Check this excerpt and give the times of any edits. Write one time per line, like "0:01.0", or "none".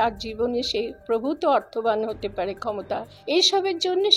0:03.1